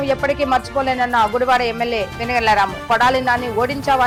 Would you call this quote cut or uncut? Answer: uncut